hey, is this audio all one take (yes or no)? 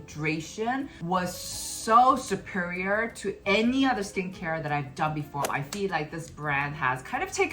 no